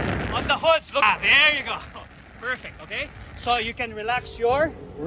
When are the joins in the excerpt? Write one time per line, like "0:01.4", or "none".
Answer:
0:01.0